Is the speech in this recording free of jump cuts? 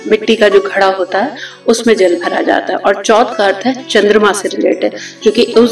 yes; 0 cuts

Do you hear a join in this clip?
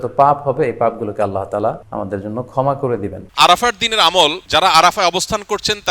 yes; 3 cuts; at 1.9 s, 3.2 s, 4.4 s

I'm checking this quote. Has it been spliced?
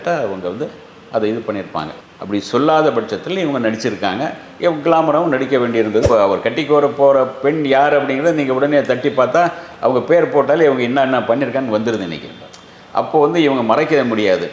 yes; 1 cut; at 6.0 s

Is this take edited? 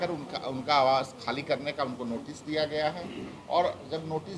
no; 0 cuts

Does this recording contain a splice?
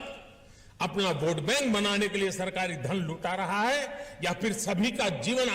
no; 0 cuts

